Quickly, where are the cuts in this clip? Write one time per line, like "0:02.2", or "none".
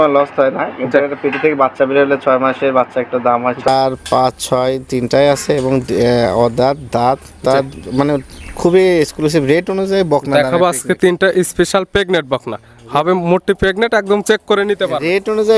0:03.7